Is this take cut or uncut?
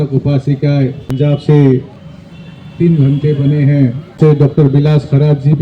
cut